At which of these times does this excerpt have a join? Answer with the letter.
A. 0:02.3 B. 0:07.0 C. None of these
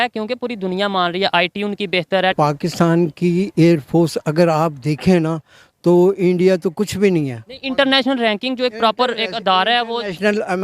A